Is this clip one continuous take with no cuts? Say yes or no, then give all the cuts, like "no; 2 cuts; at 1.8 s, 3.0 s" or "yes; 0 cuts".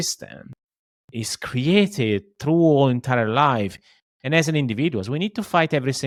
yes; 0 cuts